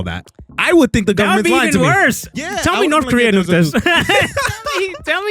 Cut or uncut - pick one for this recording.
cut